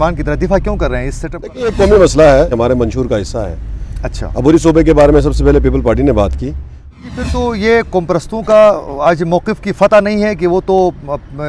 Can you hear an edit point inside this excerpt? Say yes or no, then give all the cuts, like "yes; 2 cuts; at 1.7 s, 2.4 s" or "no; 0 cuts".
yes; 2 cuts; at 2.5 s, 7.0 s